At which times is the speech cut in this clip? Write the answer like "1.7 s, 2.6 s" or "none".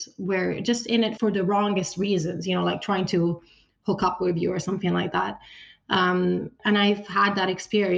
1.1 s, 6.5 s